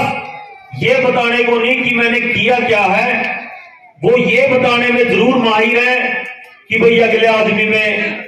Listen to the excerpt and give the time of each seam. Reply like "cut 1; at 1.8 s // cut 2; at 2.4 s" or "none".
none